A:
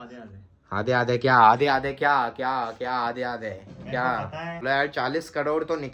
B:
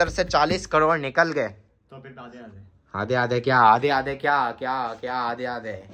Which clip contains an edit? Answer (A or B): A